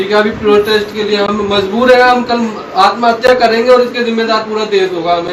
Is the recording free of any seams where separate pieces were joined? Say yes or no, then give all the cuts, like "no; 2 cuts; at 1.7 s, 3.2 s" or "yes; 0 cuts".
yes; 0 cuts